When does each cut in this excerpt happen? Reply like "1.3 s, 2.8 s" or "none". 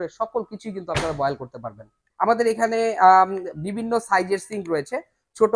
2.0 s